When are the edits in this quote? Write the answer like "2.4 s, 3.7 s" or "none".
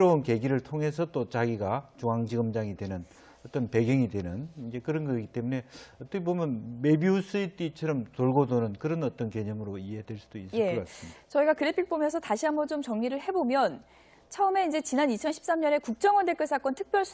4.7 s